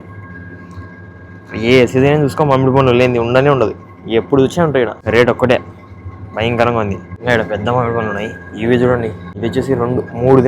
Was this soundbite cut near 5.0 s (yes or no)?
yes